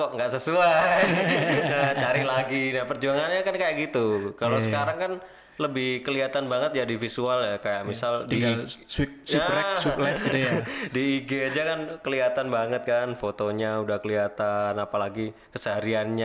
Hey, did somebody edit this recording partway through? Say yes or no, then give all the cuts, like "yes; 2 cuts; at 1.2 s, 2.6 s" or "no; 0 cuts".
no; 0 cuts